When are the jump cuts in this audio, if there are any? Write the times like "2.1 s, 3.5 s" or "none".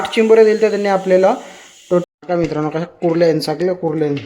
2.0 s